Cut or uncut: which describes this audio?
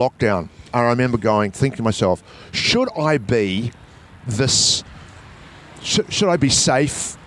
uncut